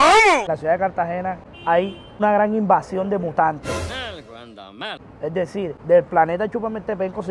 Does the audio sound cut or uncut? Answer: uncut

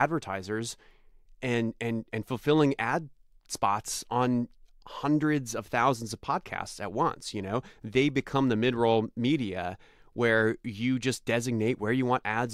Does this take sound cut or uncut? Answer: uncut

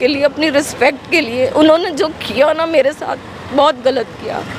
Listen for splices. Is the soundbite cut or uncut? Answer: uncut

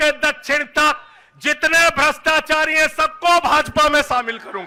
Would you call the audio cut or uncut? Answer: uncut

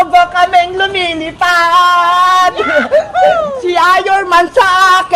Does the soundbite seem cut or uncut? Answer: cut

